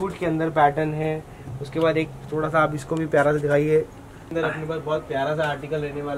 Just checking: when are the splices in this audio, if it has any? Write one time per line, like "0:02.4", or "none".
0:04.3